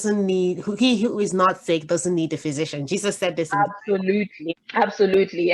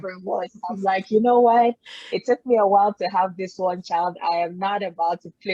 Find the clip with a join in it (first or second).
first